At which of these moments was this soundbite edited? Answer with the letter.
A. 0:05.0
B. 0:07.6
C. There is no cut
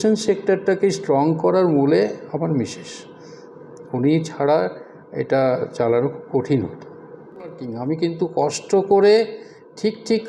B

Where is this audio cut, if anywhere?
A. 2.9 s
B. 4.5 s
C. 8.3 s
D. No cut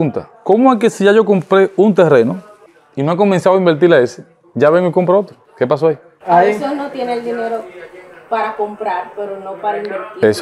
D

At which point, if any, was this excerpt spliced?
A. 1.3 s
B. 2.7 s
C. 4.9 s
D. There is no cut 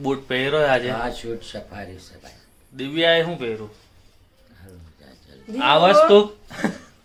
D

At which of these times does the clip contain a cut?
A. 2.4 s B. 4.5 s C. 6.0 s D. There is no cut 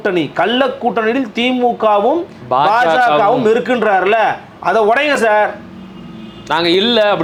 D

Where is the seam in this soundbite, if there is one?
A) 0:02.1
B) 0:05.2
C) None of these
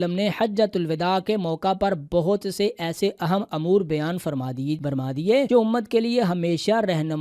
B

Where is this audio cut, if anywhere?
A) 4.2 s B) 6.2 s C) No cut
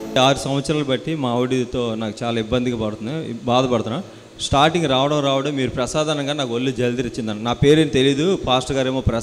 C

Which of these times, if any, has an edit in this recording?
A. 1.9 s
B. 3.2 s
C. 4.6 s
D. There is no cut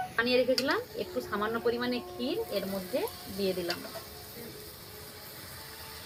D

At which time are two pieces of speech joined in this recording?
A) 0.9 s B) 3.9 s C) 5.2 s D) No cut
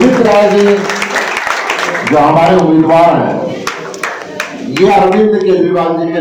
D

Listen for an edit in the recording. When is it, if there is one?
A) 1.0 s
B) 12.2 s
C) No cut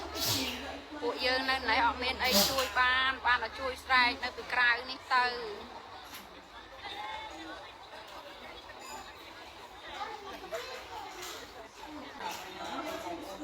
B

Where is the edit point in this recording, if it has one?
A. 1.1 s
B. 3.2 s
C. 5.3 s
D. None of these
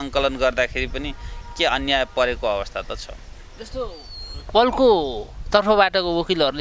D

